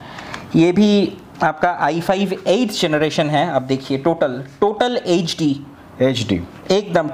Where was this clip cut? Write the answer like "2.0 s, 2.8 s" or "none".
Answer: none

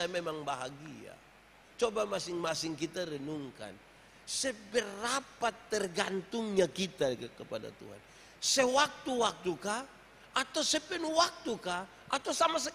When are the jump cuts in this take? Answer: 1.6 s

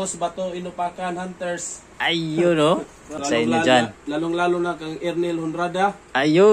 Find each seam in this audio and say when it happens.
3.2 s

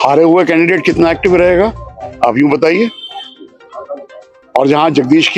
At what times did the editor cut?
none

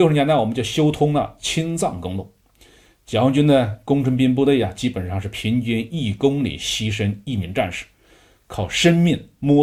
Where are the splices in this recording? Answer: none

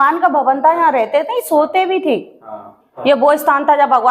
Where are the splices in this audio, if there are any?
3.0 s

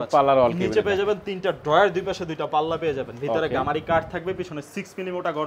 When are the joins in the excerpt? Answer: none

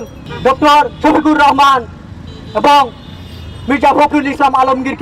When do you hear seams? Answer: none

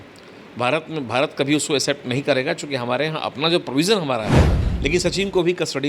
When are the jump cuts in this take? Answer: 4.7 s

